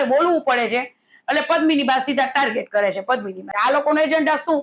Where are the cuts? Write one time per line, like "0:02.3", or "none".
0:03.5